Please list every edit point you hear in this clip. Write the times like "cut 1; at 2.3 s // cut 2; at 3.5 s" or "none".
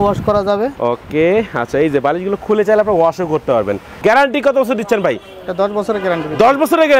cut 1; at 3.9 s

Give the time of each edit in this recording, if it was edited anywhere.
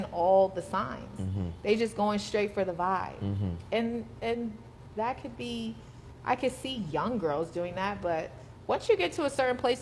none

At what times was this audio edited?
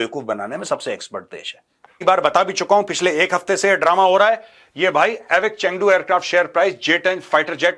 cut 1; at 2.1 s

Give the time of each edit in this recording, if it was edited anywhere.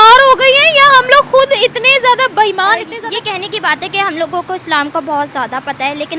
cut 1; at 2.9 s

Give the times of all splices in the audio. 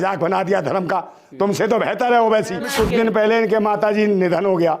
cut 1; at 2.7 s

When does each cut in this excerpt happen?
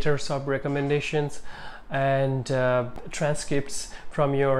cut 1; at 3.0 s

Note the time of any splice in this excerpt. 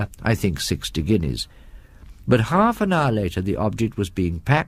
none

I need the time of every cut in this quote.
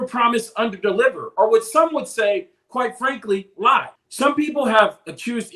cut 1; at 4.0 s

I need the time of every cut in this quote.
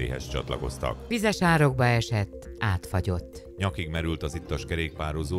cut 1; at 1.0 s

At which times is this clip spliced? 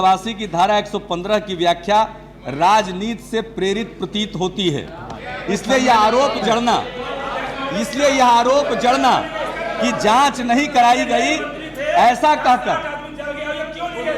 none

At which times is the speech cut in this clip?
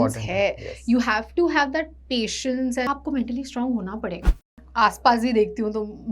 cut 1; at 2.8 s // cut 2; at 4.4 s

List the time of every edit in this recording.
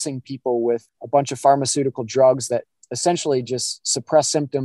cut 1; at 0.9 s

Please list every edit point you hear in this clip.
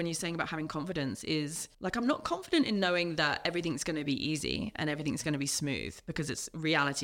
cut 1; at 1.6 s

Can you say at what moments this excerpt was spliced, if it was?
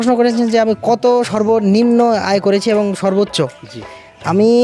none

